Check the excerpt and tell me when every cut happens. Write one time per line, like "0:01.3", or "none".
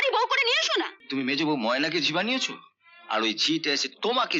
0:01.0